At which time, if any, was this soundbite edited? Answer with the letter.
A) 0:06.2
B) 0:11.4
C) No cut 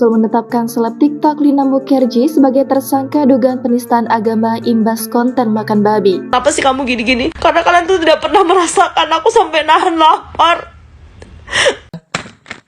A